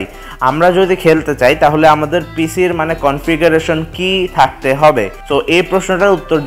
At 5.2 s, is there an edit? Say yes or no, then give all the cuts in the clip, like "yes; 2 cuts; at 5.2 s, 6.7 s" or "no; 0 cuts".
yes; 1 cut; at 5.2 s